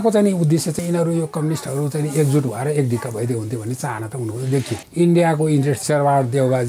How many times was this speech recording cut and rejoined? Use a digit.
3